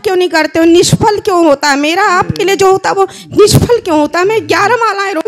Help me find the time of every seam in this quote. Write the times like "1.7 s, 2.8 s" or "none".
none